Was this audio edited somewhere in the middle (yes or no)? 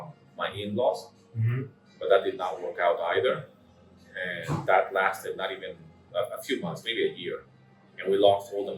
no